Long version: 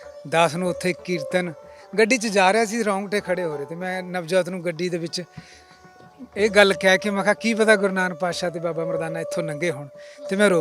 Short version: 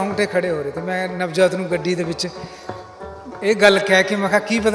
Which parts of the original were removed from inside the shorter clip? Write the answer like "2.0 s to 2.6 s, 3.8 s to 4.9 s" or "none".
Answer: none